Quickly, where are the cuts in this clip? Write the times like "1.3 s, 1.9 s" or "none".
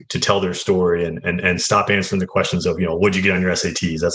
none